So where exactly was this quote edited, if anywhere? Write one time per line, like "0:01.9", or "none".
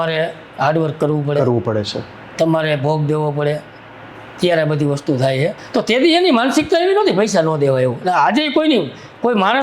0:05.6